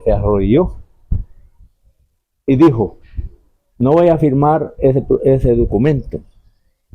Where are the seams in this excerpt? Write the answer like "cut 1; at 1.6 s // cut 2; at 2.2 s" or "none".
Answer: none